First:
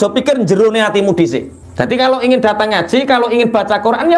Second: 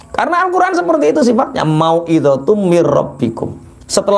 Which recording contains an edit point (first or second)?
first